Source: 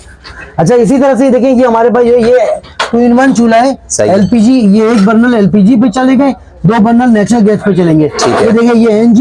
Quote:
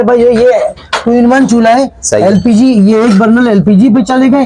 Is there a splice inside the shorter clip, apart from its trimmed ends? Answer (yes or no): no